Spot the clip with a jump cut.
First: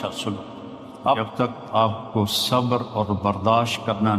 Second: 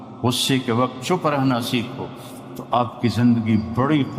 first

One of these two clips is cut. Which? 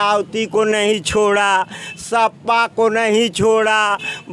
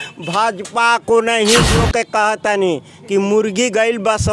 second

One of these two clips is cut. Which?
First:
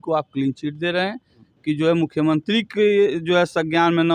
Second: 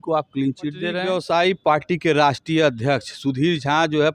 second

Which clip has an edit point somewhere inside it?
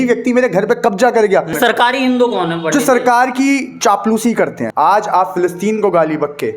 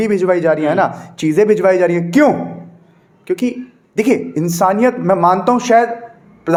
first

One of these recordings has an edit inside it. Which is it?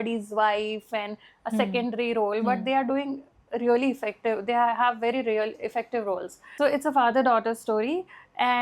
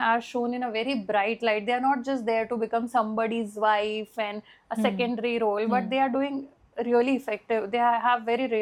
first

